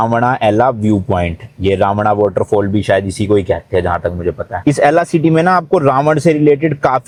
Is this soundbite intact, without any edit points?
yes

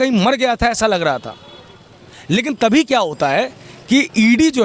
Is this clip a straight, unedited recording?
yes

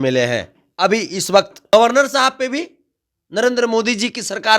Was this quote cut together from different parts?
yes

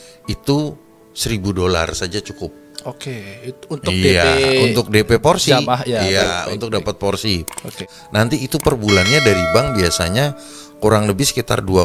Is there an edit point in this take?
yes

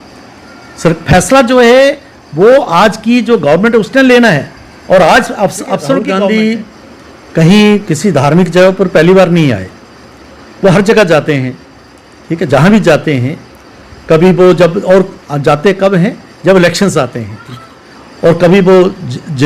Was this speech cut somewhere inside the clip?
yes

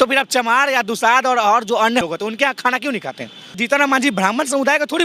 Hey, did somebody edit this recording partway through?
yes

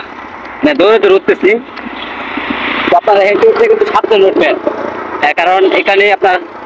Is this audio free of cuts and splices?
yes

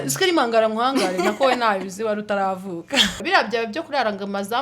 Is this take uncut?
no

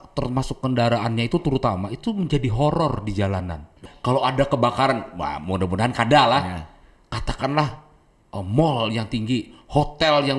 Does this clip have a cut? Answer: yes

